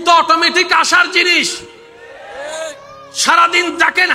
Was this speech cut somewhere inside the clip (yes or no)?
no